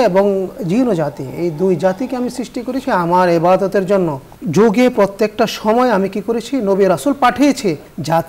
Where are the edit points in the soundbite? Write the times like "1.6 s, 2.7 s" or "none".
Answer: 2.8 s, 4.3 s